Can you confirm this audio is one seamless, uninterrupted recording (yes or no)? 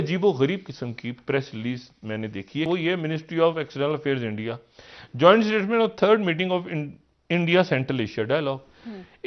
no